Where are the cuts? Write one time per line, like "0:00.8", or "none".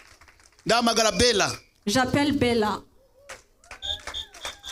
none